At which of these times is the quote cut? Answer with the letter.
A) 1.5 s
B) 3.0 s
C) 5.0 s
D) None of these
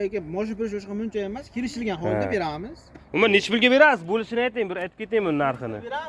B